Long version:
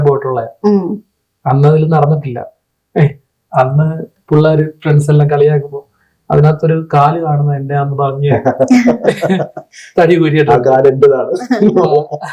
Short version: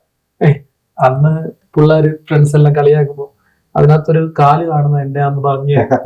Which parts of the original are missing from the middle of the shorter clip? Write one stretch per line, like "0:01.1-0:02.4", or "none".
none